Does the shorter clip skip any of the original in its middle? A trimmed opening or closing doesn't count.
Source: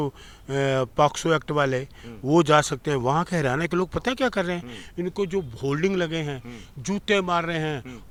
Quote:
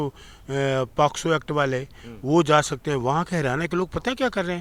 no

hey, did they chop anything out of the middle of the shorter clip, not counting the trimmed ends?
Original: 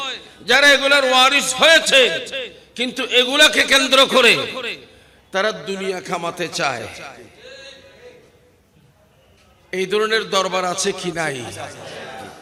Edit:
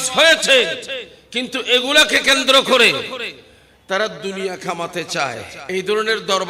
yes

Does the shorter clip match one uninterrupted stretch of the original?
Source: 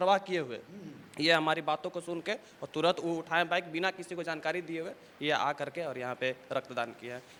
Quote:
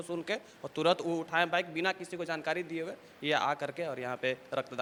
yes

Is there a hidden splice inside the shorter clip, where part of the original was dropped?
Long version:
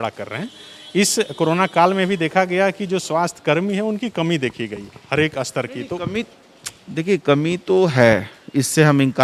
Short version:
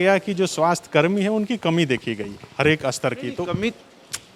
no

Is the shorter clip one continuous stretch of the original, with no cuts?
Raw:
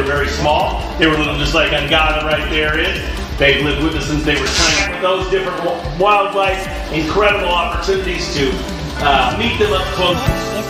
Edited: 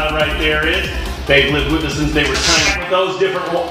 yes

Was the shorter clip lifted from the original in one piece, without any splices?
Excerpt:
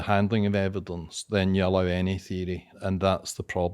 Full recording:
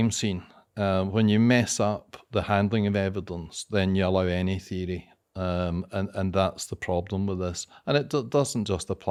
no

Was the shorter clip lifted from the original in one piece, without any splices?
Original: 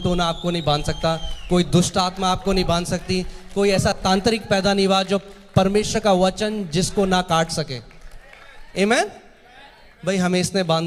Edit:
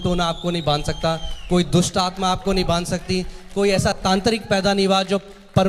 yes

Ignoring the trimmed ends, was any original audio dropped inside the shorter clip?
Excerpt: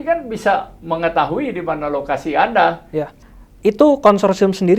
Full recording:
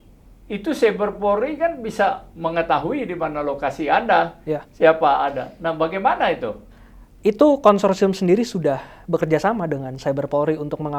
yes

